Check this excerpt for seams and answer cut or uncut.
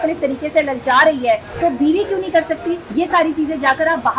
cut